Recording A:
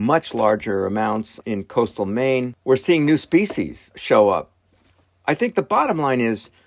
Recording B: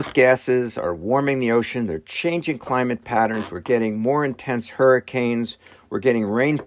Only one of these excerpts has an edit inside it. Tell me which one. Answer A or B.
A